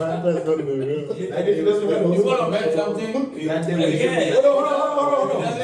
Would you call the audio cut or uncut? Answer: cut